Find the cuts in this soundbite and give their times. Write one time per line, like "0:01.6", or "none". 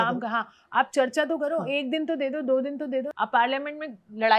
0:03.1